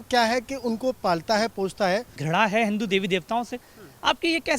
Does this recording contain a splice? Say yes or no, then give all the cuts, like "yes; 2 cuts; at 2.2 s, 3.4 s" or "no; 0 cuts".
yes; 1 cut; at 2.2 s